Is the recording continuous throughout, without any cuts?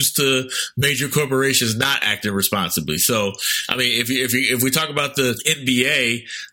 no; 1 cut; at 5.5 s

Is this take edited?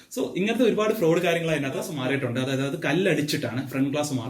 yes; 1 cut; at 1.9 s

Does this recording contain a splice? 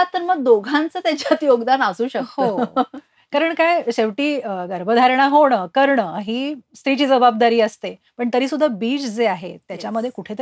no; 0 cuts

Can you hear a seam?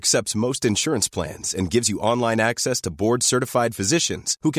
no; 0 cuts

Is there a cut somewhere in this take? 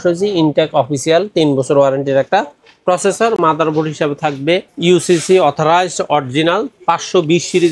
no; 0 cuts

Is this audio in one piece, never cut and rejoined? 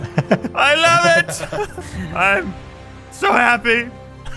no; 1 cut; at 1.8 s

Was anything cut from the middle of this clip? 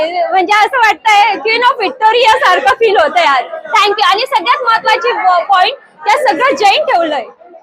no; 0 cuts

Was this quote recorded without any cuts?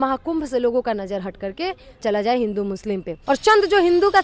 no; 2 cuts; at 2.0 s, 3.1 s

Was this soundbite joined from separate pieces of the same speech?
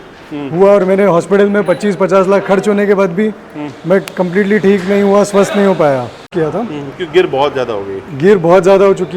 yes; 1 cut; at 6.3 s

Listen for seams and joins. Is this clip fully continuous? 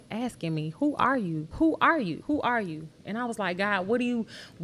no; 2 cuts; at 1.5 s, 2.2 s

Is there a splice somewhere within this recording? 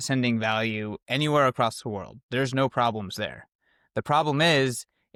no; 0 cuts

